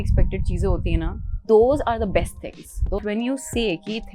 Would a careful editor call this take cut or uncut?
cut